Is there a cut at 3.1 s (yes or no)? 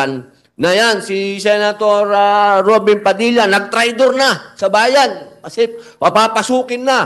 no